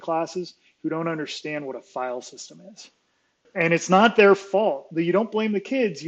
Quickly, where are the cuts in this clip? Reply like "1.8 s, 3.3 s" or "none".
3.4 s